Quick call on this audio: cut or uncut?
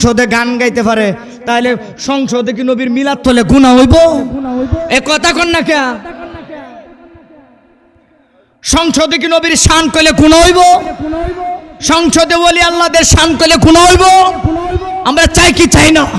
uncut